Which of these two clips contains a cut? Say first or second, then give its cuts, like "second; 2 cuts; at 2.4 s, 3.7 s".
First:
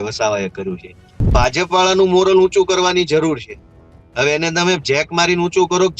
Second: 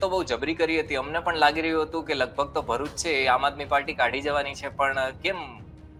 first; 1 cut; at 1.3 s